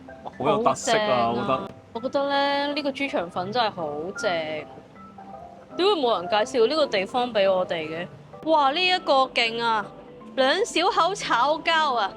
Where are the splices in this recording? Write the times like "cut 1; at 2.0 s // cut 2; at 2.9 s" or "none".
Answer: cut 1; at 1.7 s // cut 2; at 8.4 s

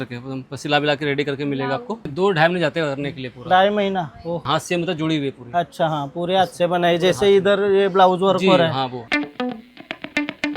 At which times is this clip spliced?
cut 1; at 2.1 s // cut 2; at 4.4 s // cut 3; at 9.0 s

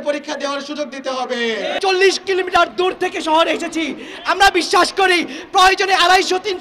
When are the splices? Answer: cut 1; at 1.8 s

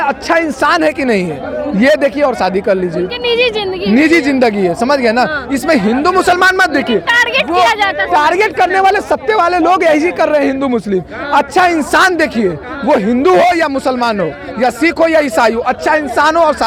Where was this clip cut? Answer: none

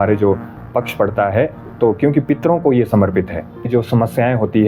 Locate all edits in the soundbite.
cut 1; at 3.7 s

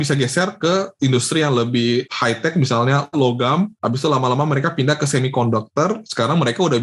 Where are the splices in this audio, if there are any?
none

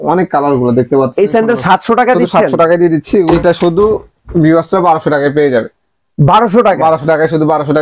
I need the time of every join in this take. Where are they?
cut 1; at 3.3 s

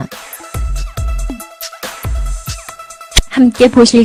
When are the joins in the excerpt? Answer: none

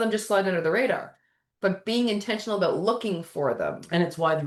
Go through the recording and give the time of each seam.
none

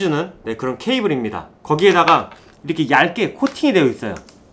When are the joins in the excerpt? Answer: none

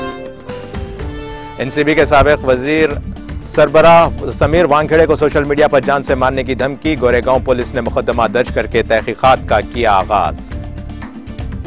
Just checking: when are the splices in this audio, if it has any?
none

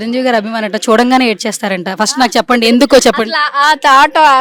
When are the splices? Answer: none

